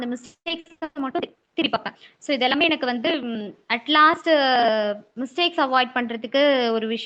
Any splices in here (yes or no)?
no